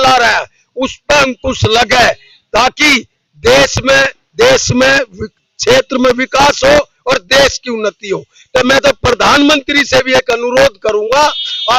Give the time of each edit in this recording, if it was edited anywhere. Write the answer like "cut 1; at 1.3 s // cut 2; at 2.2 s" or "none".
none